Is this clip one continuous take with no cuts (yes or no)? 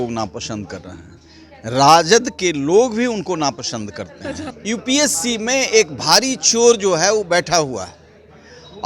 no